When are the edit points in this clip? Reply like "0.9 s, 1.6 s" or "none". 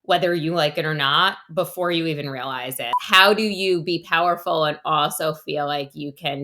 3.0 s